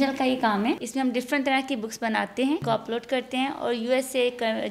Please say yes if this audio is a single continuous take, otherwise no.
no